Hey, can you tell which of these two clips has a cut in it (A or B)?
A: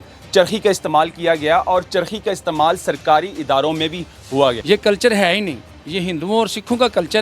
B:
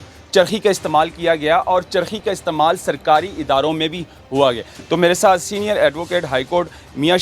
A